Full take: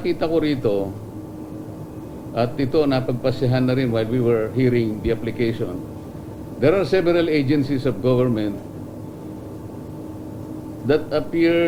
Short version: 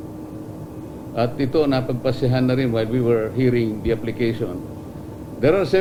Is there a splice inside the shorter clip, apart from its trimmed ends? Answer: no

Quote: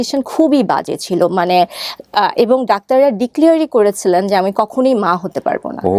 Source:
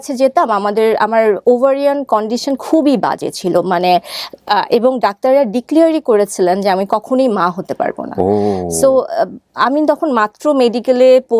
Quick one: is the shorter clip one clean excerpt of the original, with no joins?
yes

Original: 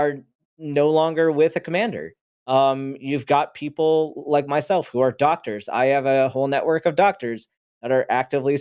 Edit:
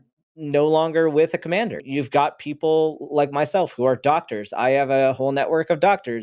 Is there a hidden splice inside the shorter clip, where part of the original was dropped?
yes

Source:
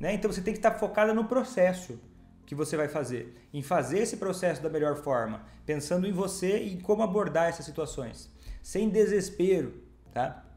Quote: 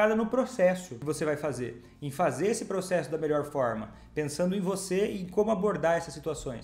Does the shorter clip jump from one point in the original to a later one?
yes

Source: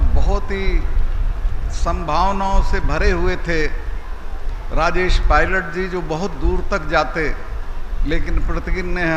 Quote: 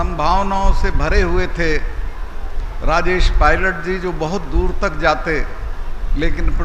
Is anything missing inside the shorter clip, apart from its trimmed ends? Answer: no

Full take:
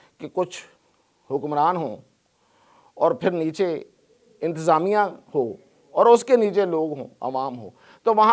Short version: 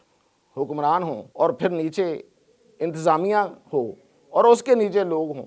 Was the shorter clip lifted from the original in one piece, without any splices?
no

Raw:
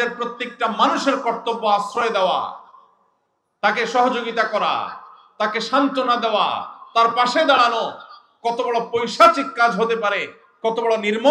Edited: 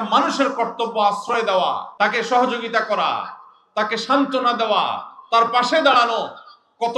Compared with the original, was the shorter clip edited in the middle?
yes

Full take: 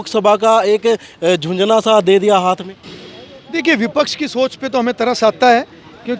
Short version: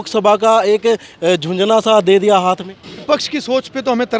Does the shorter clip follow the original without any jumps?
no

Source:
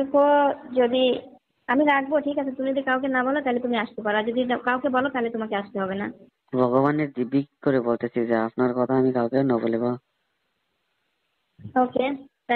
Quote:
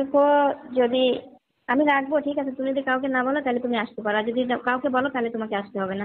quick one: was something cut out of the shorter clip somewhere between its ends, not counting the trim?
no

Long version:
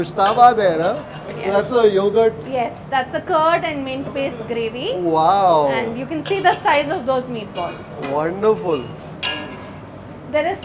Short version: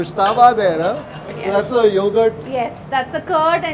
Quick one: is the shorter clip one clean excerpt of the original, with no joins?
yes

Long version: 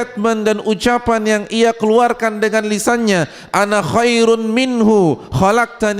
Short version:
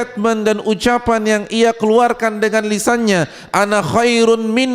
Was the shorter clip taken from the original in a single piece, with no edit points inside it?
yes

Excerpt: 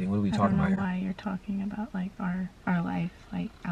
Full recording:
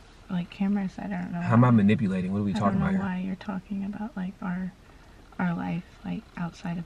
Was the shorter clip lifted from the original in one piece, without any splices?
no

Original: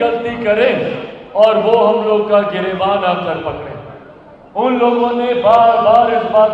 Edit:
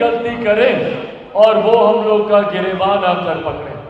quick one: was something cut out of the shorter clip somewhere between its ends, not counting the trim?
no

